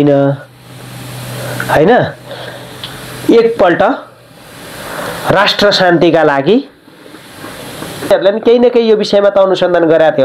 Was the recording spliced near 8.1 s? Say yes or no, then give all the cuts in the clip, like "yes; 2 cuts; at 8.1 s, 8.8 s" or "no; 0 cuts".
yes; 1 cut; at 8.1 s